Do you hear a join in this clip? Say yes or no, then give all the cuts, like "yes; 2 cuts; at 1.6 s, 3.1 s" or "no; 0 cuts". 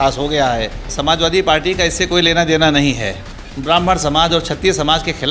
yes; 2 cuts; at 0.9 s, 3.5 s